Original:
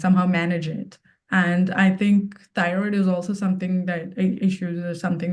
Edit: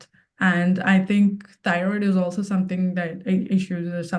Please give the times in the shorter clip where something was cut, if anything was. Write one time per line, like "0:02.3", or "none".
none